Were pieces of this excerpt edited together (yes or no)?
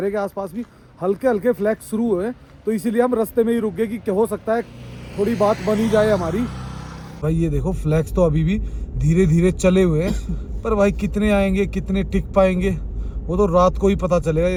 no